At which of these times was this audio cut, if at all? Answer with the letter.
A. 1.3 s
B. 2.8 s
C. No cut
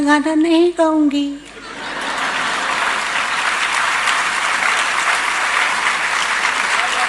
C